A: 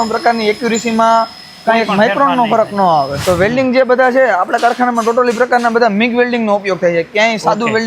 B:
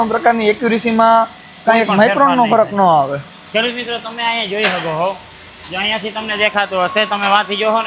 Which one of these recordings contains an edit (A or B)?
A